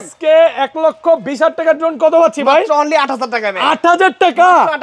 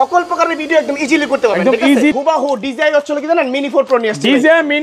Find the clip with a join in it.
second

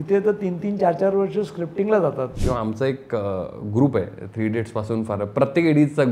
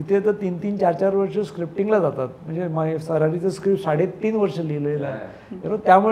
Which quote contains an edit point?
first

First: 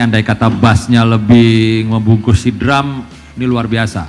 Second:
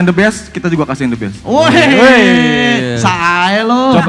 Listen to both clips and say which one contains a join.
first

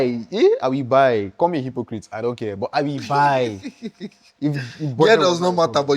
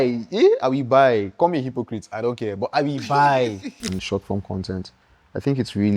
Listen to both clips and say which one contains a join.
second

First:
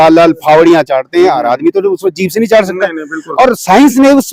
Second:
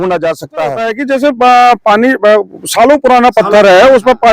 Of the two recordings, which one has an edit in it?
second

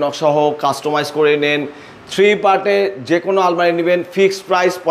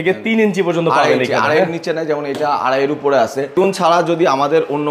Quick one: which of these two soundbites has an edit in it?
second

